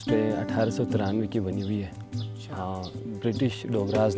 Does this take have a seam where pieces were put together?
no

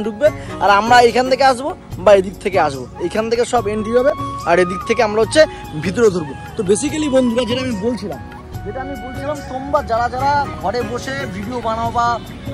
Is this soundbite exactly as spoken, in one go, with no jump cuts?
yes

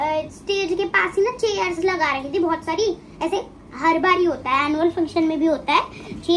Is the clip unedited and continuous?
yes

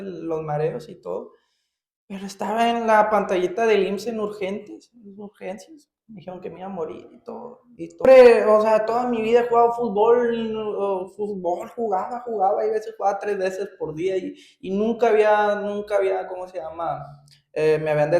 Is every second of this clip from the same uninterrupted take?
no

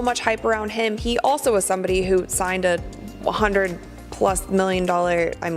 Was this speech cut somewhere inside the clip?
no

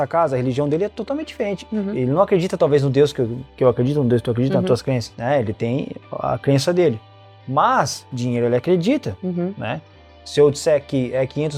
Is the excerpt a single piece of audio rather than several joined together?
yes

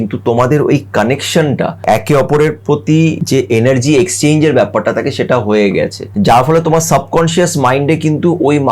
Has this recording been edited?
yes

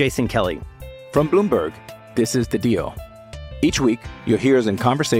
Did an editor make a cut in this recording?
no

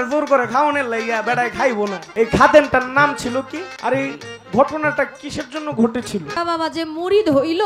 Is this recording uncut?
no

